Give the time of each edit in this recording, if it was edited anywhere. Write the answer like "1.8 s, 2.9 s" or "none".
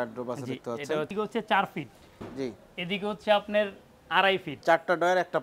1.1 s, 4.5 s